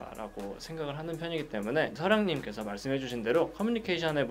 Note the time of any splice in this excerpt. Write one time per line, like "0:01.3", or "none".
none